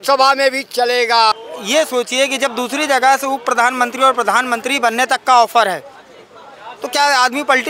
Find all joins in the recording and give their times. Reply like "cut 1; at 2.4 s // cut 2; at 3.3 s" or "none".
cut 1; at 1.5 s

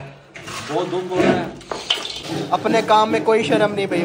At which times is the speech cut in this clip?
cut 1; at 2.2 s

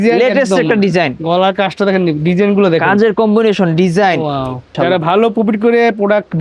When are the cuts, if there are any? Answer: cut 1; at 4.7 s

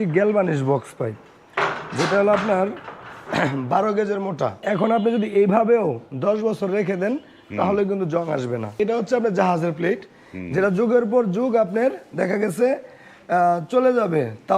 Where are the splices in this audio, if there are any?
cut 1; at 4.6 s // cut 2; at 8.7 s

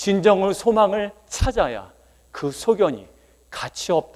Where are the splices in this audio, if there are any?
none

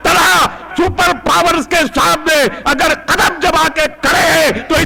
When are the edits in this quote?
none

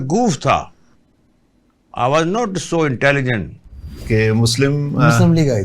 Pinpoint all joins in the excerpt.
none

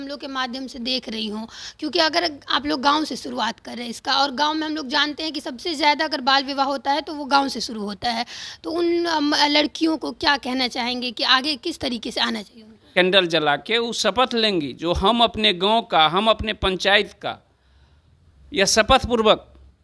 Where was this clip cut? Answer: cut 1; at 12.9 s

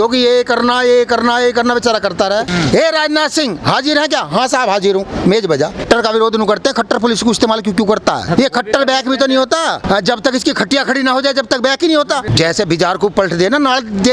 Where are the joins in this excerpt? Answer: cut 1; at 2.5 s // cut 2; at 5.8 s // cut 3; at 8.3 s // cut 4; at 9.8 s // cut 5; at 12.3 s

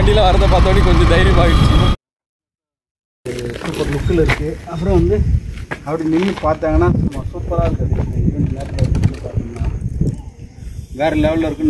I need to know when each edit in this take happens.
cut 1; at 1.9 s

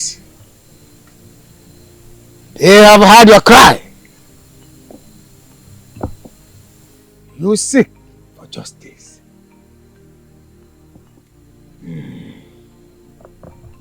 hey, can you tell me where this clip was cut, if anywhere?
none

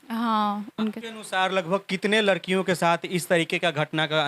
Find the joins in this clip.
cut 1; at 1.0 s

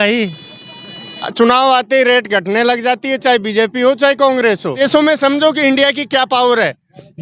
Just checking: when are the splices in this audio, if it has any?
cut 1; at 1.2 s // cut 2; at 4.8 s

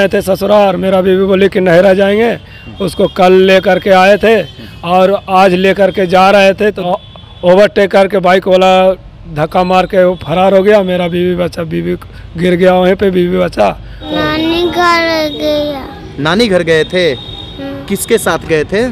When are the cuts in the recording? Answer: cut 1; at 6.8 s // cut 2; at 14.0 s

